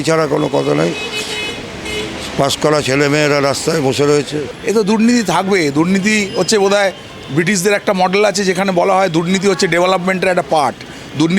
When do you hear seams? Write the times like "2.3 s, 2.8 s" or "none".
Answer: 4.5 s